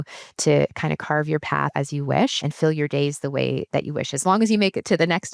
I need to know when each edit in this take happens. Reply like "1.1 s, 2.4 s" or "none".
1.7 s, 2.4 s